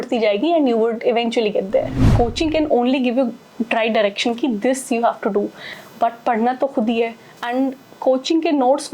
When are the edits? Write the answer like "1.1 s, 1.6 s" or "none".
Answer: 2.1 s